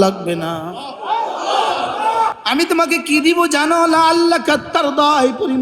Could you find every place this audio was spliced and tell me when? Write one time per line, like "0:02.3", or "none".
0:02.4